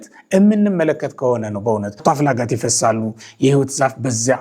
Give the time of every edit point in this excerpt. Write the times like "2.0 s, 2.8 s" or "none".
2.0 s